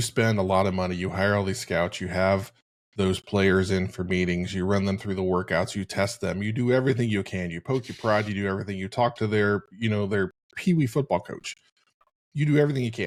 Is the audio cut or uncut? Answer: uncut